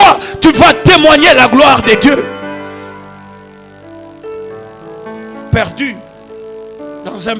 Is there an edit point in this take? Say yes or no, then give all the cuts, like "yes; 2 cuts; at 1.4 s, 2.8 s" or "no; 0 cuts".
no; 0 cuts